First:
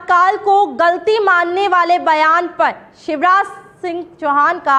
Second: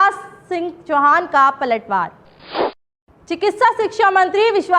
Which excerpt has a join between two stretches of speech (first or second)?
second